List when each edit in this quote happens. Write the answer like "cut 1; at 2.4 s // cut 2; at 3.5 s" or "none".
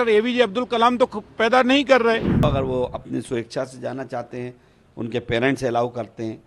cut 1; at 2.4 s